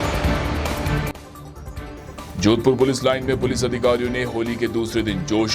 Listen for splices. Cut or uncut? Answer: uncut